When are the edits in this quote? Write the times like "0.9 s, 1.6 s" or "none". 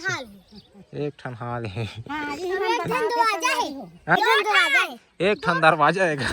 4.2 s

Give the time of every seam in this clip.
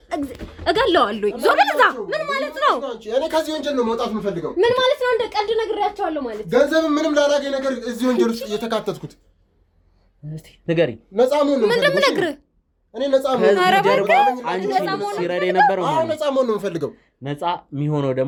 none

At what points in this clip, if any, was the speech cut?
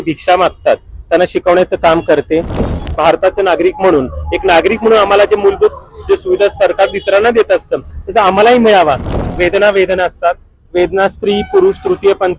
2.7 s, 9.1 s

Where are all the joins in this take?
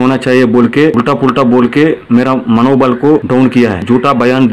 0.9 s, 3.6 s

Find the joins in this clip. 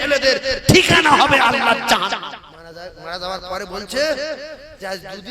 2.2 s

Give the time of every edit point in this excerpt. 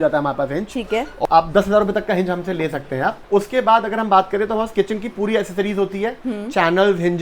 1.1 s, 3.2 s

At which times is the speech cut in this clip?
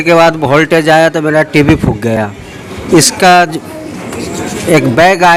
none

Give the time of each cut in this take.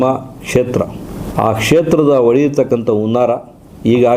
1.1 s

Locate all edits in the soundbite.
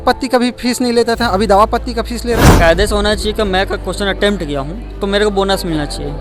2.5 s

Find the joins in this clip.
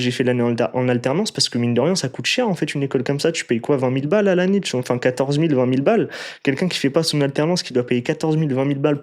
none

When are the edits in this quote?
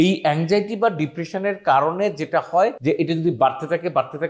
2.8 s

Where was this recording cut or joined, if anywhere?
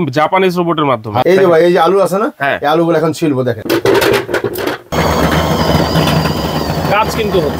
1.2 s, 3.6 s, 4.9 s

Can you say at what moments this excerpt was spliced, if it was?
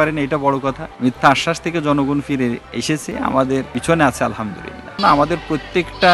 0.9 s, 2.7 s, 3.7 s, 5.0 s

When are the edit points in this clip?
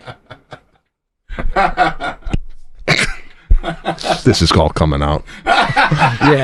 none

